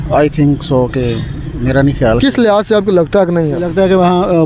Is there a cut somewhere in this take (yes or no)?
no